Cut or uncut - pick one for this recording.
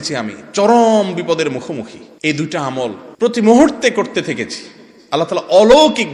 cut